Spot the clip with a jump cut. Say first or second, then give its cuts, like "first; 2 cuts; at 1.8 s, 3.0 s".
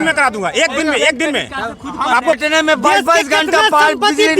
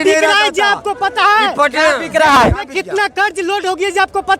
first; 1 cut; at 2.4 s